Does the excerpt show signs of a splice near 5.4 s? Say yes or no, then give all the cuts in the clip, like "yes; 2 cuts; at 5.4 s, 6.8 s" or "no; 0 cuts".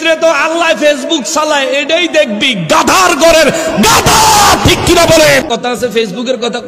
yes; 1 cut; at 5.4 s